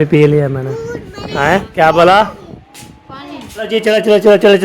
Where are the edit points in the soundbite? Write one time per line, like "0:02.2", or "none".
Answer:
0:03.7

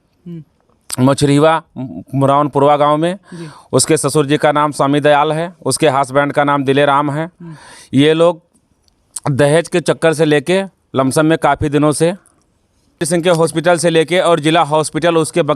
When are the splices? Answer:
0:13.0

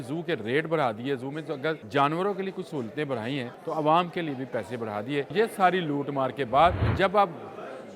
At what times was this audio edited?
0:01.8
0:03.5
0:05.3
0:06.9

